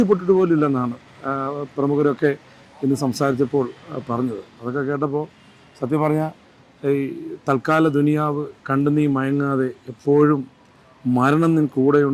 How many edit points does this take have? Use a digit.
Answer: 0